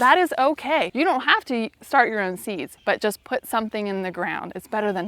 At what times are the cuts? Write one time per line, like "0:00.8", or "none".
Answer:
0:00.9
0:02.7